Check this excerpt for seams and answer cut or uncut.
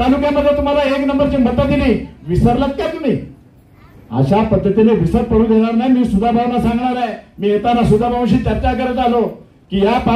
uncut